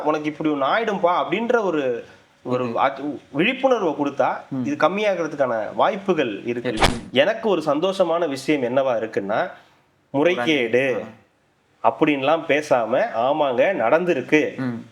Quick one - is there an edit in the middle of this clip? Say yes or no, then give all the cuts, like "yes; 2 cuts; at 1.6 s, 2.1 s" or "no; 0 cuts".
yes; 1 cut; at 6.8 s